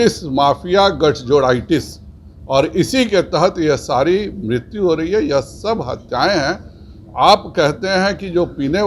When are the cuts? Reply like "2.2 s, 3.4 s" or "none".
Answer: none